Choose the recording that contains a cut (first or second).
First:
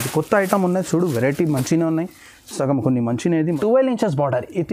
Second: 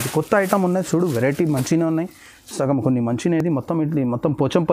first